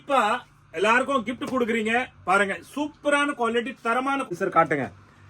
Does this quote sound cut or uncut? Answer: cut